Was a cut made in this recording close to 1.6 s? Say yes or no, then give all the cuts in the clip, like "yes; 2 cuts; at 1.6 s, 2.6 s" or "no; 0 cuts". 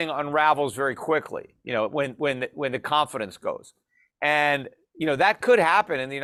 no; 0 cuts